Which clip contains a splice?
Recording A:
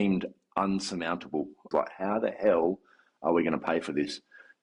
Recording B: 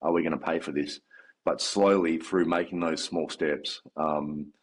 A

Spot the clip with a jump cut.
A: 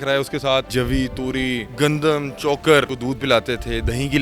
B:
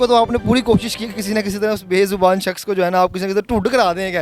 A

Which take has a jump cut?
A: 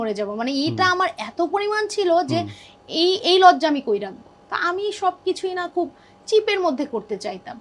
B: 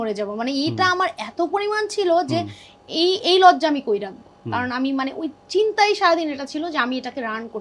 A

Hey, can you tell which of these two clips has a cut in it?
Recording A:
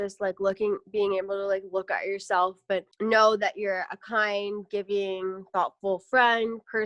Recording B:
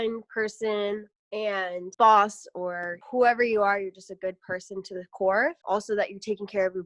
B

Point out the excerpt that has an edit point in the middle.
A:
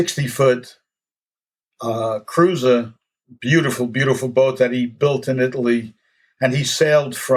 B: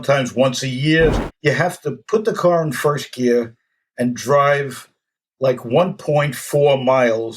B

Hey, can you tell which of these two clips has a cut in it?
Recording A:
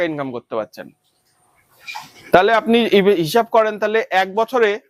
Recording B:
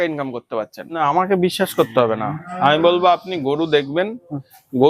B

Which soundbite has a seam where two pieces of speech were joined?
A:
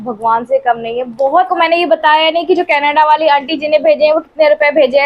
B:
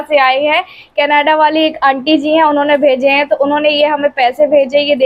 A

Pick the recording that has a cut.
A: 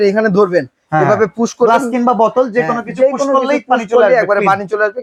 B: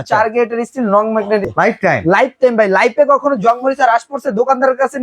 B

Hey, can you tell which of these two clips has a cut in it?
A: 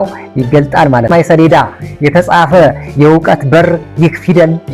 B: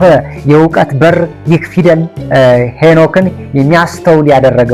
A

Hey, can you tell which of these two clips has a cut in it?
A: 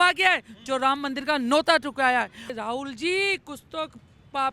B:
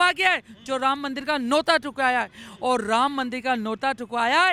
A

